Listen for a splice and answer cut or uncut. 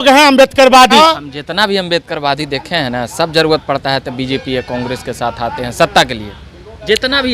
cut